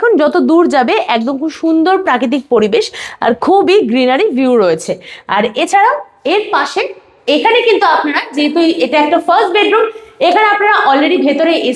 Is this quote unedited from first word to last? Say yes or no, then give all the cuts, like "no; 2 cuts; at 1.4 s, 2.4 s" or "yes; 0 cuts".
yes; 0 cuts